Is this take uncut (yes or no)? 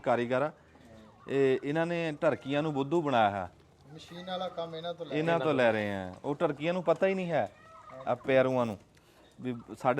yes